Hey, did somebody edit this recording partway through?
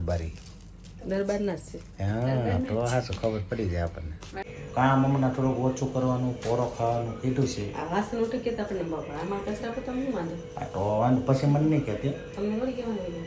yes; 1 cut; at 4.5 s

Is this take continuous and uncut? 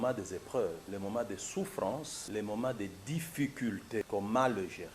no; 3 cuts; at 0.8 s, 2.2 s, 4.1 s

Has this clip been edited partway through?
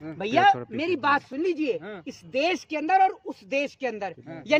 no; 0 cuts

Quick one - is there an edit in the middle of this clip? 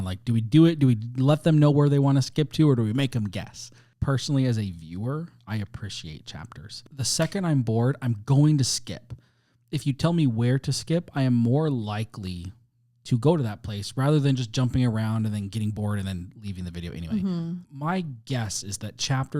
yes; 1 cut; at 3.9 s

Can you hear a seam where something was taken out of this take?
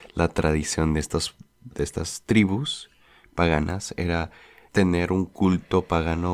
no; 0 cuts

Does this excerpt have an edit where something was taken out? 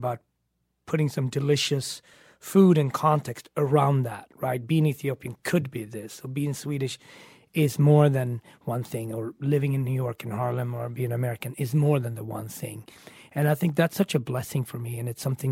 no; 0 cuts

